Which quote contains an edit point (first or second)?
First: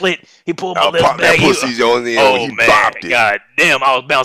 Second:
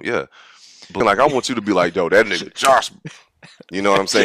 second